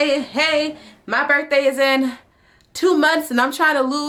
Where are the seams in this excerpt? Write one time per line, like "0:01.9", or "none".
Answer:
none